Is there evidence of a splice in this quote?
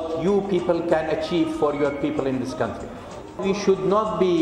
yes; 1 cut; at 3.4 s

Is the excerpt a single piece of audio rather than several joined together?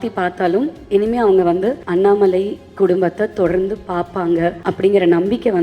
no; 2 cuts; at 1.8 s, 4.6 s

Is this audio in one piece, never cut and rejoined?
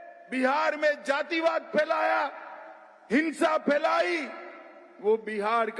yes; 0 cuts

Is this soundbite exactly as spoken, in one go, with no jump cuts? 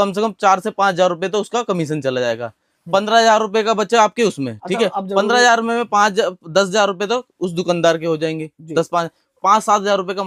yes; 0 cuts

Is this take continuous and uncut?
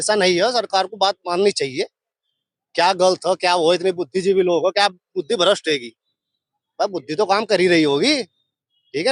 yes; 0 cuts

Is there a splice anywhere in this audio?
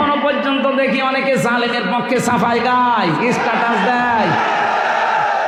no; 0 cuts

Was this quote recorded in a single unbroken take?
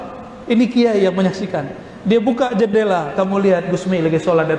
yes; 0 cuts

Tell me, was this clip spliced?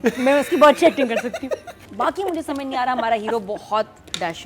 yes; 1 cut; at 1.8 s

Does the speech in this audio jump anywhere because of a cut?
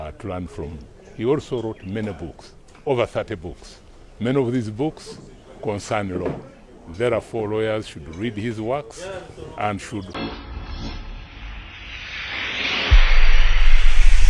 yes; 1 cut; at 10.1 s

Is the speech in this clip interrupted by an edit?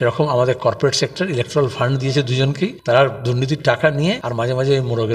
yes; 2 cuts; at 2.8 s, 4.3 s

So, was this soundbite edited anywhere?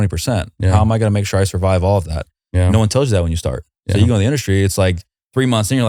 no; 0 cuts

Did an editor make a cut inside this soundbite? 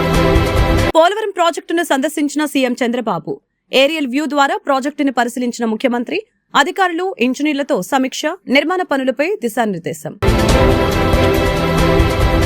yes; 1 cut; at 0.9 s

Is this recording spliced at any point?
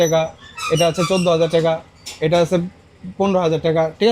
no; 0 cuts

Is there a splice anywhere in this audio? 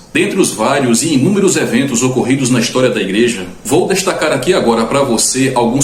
no; 0 cuts

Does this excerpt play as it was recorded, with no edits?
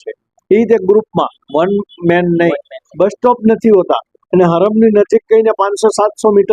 no; 1 cut; at 2.8 s

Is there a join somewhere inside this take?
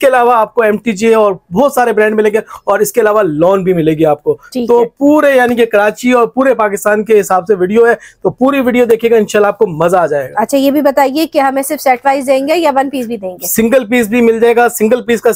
no; 0 cuts

